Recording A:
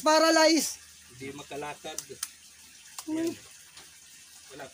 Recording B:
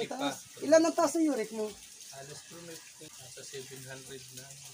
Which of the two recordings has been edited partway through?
B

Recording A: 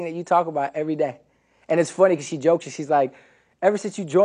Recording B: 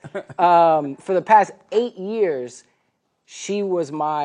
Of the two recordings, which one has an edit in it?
B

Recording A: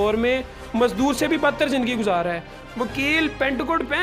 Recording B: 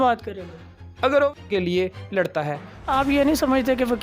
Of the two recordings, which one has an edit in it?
B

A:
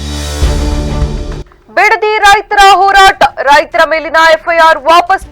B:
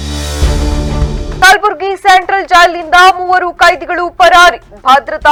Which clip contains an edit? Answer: A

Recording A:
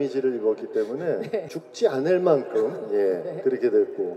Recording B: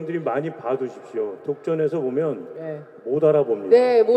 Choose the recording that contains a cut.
A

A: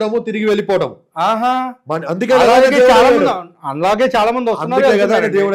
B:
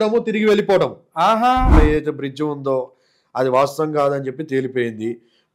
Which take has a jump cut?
B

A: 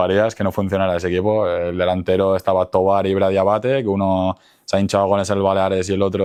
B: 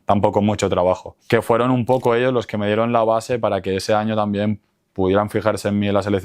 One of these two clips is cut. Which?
B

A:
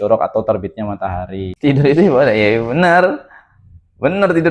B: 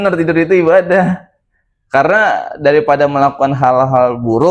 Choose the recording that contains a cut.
A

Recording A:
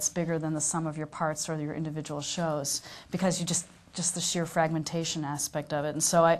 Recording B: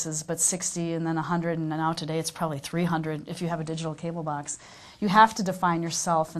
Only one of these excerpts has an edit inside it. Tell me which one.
B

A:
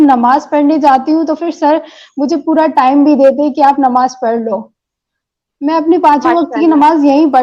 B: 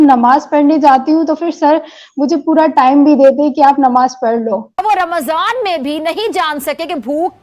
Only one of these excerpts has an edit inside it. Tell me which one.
B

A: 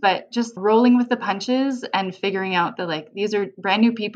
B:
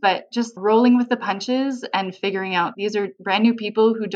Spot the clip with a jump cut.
B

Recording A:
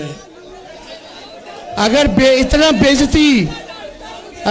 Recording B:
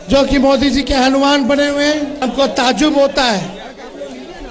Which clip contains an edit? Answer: B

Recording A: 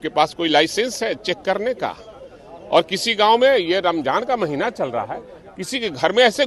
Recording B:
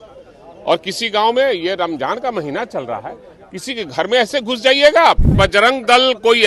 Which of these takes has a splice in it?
B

